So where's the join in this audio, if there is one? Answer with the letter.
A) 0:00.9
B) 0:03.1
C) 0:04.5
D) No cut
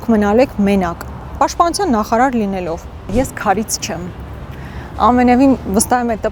B